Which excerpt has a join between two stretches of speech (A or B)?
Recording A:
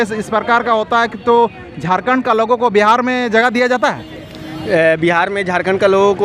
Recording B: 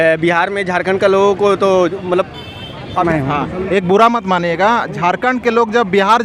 B